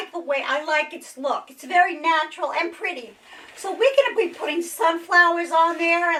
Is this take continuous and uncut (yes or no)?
yes